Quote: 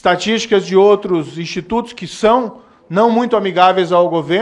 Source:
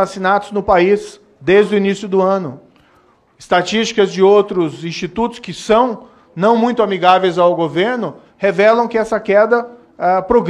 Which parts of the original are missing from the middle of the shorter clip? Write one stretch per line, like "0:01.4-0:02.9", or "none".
none